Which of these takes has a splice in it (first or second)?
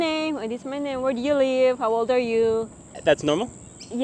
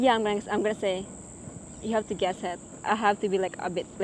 first